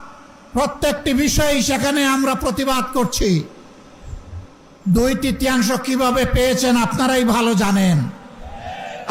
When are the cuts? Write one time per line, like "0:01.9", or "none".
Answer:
none